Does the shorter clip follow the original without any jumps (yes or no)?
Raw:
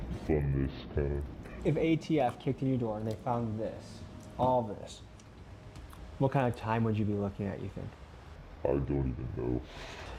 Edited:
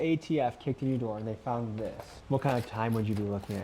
no